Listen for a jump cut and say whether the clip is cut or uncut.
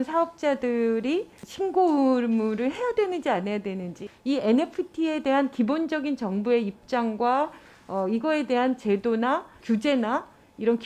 cut